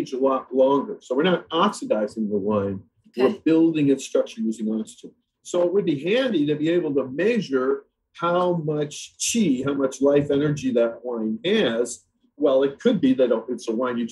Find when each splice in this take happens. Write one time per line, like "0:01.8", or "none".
none